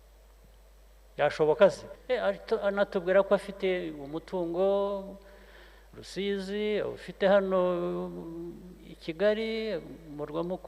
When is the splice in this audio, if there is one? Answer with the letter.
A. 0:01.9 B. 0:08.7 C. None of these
A